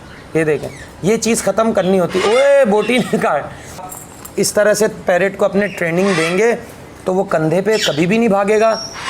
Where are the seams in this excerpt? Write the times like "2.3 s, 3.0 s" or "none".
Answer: 3.9 s